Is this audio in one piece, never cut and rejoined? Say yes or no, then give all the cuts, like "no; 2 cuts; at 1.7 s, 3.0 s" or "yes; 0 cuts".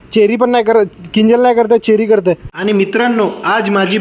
no; 1 cut; at 2.5 s